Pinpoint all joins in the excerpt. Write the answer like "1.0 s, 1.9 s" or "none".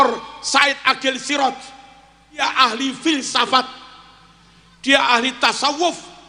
2.4 s